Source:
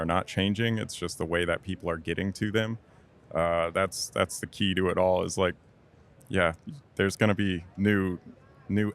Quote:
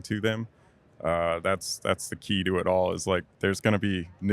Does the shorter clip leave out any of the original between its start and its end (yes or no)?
yes